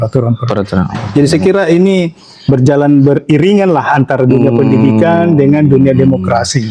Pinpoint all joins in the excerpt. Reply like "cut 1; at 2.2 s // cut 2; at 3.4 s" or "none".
none